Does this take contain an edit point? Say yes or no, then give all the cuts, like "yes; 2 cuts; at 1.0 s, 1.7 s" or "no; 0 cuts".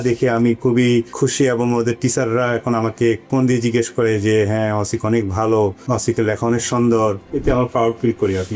no; 0 cuts